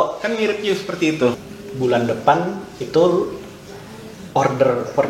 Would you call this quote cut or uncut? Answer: cut